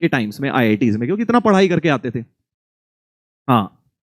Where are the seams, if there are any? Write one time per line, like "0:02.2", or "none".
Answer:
none